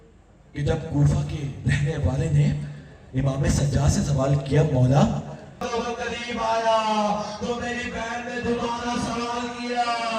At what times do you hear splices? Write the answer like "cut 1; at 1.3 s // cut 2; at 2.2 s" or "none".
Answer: cut 1; at 5.7 s